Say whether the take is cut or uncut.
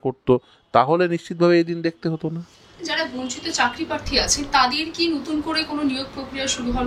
uncut